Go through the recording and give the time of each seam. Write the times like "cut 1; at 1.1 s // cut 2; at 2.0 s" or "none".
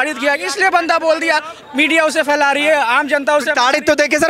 cut 1; at 1.5 s